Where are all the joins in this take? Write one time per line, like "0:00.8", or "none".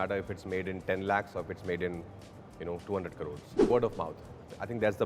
0:03.7